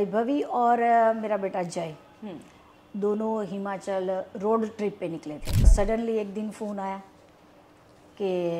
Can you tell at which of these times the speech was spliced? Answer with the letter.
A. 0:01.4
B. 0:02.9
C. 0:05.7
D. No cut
C